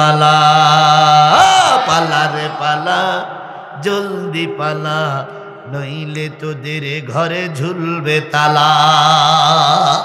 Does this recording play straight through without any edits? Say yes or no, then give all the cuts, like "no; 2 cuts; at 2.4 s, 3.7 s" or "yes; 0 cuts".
yes; 0 cuts